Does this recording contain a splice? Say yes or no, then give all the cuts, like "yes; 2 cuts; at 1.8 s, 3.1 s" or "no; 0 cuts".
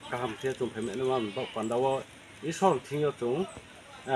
no; 0 cuts